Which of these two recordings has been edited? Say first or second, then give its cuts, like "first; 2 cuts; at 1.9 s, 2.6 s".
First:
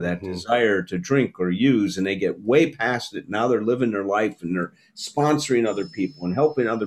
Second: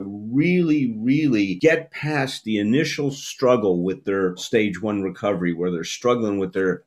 second; 1 cut; at 1.5 s